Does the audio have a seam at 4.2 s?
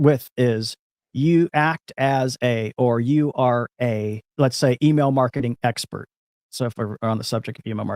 yes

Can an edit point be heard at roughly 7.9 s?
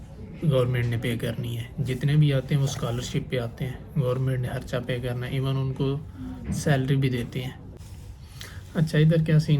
yes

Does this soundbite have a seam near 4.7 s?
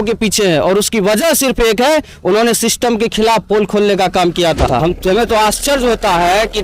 yes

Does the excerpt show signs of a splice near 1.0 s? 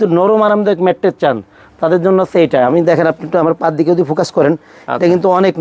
no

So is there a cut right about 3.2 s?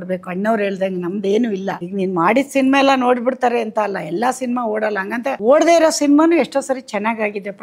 no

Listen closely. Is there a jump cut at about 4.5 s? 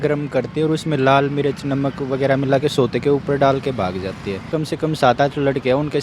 yes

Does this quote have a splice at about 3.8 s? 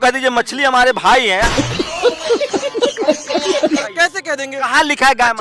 yes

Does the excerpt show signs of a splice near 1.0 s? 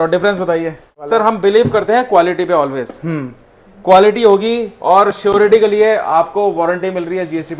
yes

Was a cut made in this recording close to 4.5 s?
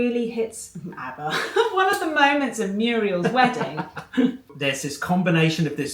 yes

